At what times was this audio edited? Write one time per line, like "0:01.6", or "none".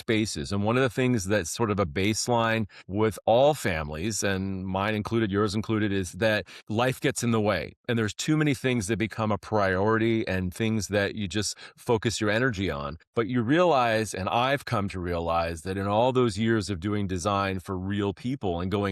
0:02.8
0:06.6
0:12.9

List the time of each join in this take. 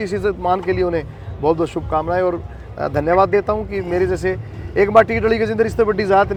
none

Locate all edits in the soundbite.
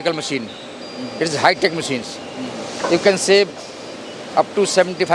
none

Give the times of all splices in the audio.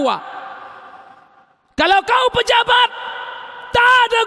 none

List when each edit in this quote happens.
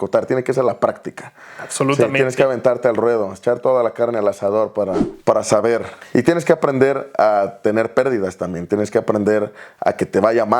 0:05.1

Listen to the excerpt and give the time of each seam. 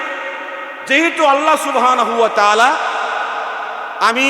none

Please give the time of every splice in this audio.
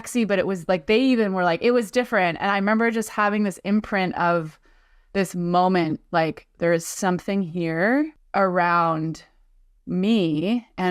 0:08.2

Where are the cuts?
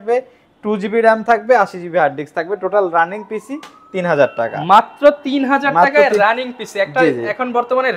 none

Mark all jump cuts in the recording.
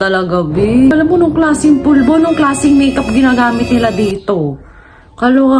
0:00.9

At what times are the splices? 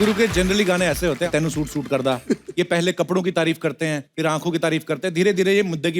0:01.3
0:04.1

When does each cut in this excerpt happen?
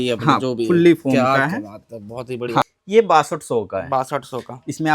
0:02.7

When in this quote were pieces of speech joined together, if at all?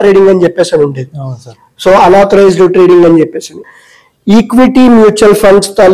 0:03.7

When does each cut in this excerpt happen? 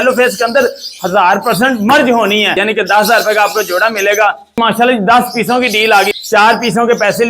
0:02.6
0:04.6
0:06.1

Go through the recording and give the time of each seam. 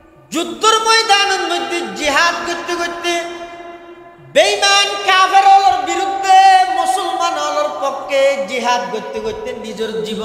none

